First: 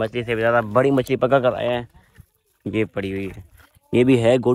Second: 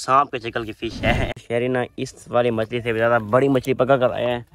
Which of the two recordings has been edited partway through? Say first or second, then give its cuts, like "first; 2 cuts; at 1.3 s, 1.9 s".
second; 1 cut; at 1.4 s